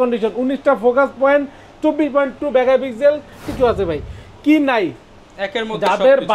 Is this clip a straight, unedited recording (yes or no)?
no